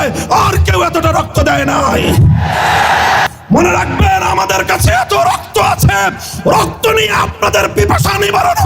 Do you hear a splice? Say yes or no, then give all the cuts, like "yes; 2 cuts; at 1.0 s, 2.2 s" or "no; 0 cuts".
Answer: yes; 1 cut; at 3.3 s